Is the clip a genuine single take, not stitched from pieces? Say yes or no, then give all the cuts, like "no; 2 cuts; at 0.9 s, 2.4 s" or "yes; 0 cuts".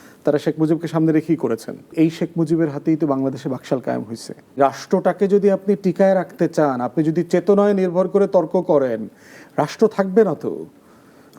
no; 2 cuts; at 1.9 s, 4.6 s